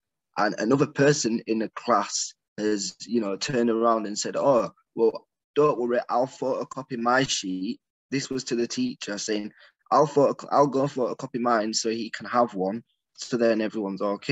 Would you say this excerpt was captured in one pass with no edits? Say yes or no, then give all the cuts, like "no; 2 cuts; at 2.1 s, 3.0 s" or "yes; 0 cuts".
yes; 0 cuts